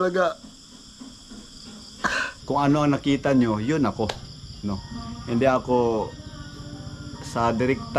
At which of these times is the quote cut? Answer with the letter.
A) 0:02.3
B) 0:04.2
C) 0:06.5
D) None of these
A